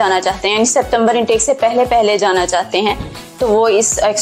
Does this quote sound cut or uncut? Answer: uncut